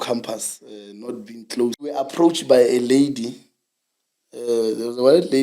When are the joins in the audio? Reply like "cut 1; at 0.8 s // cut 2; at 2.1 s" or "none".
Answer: cut 1; at 2.1 s